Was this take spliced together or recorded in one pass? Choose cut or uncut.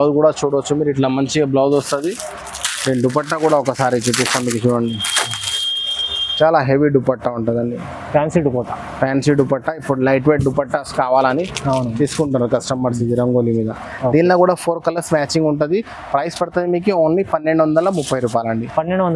uncut